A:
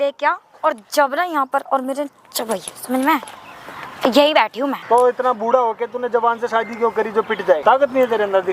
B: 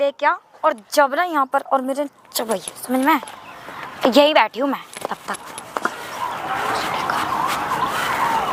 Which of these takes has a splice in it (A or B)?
A